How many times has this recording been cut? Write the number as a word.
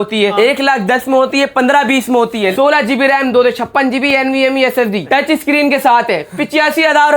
two